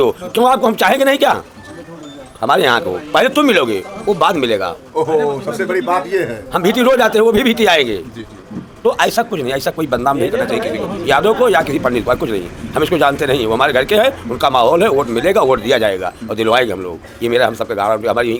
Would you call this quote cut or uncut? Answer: uncut